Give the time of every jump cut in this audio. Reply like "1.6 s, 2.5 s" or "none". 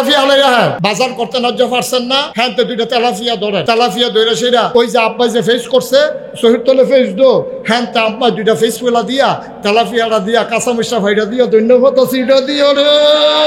0.8 s, 2.3 s, 3.6 s, 4.7 s